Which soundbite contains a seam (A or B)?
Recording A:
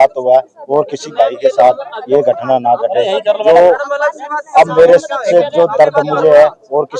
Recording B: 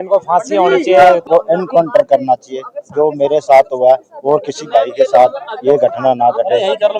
B